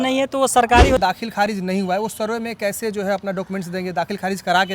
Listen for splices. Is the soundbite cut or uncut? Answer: cut